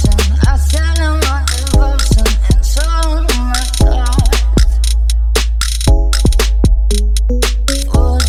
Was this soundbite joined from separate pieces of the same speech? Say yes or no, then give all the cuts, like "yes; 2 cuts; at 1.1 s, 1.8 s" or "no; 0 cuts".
no; 0 cuts